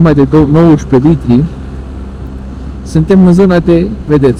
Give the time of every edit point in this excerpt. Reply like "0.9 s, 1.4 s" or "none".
none